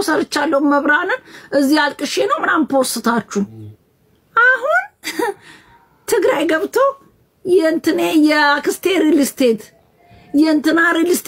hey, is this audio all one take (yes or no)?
yes